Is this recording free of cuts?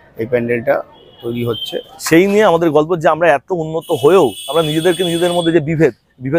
no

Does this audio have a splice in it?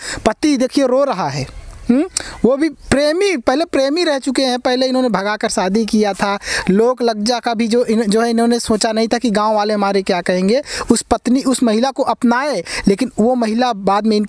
no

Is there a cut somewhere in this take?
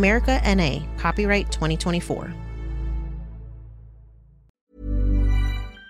yes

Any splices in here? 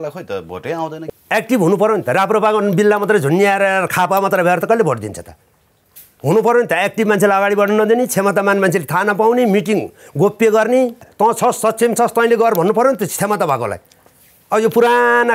yes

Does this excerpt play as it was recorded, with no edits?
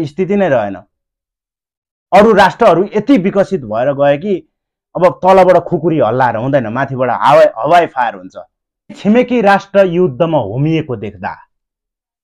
no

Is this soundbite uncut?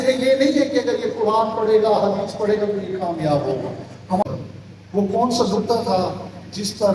no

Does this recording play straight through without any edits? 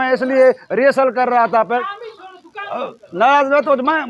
no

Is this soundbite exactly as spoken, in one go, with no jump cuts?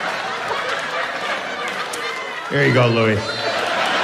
yes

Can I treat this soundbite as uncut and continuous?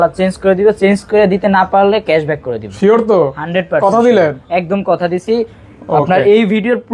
yes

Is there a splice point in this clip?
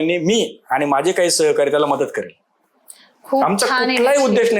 no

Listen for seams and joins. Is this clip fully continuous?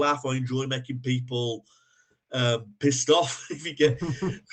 yes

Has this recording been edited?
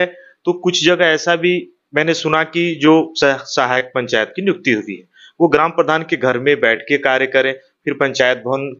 no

